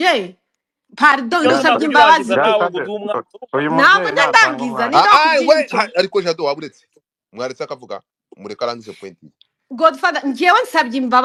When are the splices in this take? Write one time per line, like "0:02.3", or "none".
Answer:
none

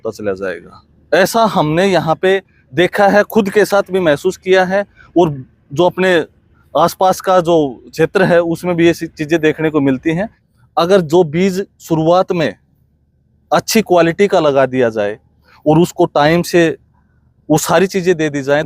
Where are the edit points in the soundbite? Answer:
0:10.4

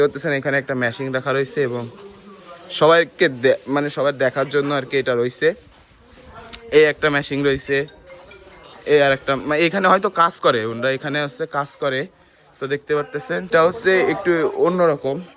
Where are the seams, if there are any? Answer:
0:13.5

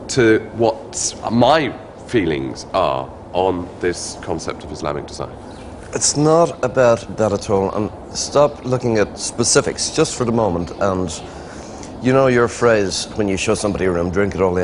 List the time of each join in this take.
none

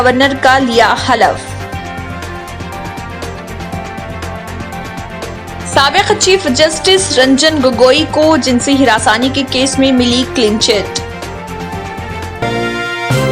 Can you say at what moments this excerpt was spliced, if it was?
0:12.4

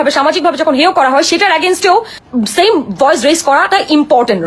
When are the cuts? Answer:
0:02.2

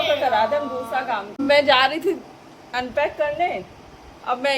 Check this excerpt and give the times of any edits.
0:01.4

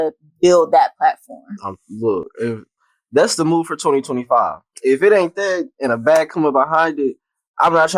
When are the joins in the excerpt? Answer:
none

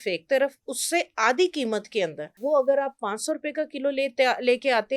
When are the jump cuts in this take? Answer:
0:02.3

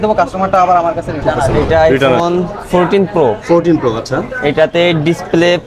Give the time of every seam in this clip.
0:01.6

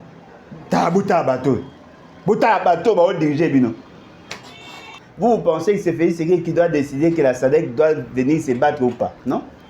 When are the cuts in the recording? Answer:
0:04.8

